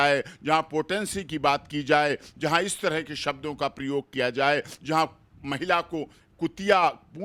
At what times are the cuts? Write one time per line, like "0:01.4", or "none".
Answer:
none